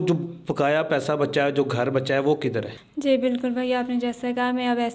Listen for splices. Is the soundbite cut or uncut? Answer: cut